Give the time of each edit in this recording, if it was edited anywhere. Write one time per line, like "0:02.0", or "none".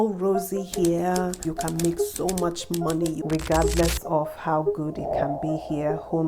0:01.4
0:03.2